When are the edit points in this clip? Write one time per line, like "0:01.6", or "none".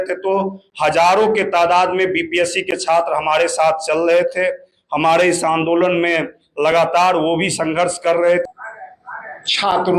0:08.5